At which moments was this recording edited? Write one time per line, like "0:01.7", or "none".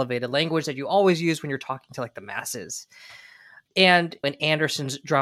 none